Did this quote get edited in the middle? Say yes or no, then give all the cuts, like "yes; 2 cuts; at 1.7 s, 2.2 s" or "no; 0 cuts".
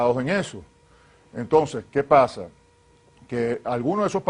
yes; 1 cut; at 3.3 s